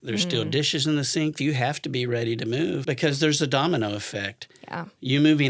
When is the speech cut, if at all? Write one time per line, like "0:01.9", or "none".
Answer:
0:01.4
0:02.8